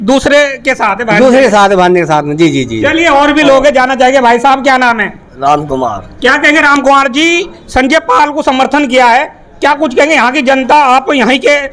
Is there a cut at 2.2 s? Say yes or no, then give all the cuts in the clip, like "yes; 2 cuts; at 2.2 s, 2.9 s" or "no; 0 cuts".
no; 0 cuts